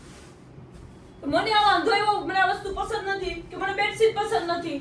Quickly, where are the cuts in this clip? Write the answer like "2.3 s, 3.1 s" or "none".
2.7 s